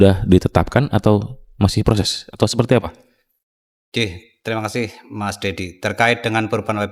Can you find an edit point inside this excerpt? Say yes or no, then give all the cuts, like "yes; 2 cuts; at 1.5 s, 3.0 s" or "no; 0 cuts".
no; 0 cuts